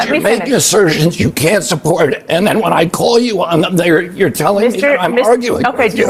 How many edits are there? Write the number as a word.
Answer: zero